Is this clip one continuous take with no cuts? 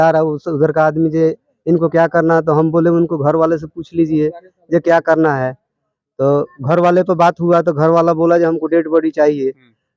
yes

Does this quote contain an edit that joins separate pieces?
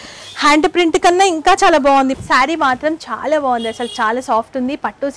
yes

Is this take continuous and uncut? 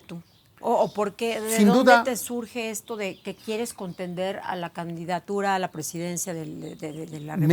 yes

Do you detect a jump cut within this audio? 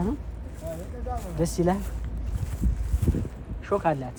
no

